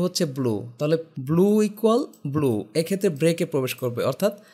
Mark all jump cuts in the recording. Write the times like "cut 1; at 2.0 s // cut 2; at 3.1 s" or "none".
cut 1; at 1.1 s